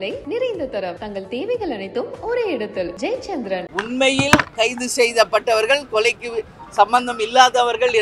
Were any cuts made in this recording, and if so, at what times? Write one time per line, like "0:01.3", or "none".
0:03.6